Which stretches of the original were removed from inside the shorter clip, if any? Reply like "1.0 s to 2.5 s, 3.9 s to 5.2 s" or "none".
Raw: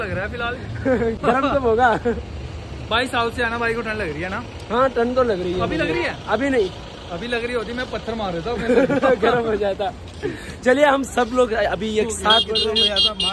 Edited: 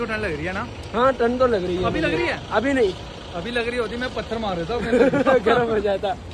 none